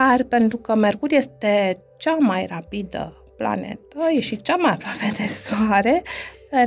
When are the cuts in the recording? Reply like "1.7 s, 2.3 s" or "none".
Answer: none